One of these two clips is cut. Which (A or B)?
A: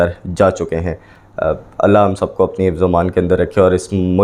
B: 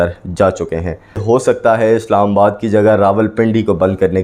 B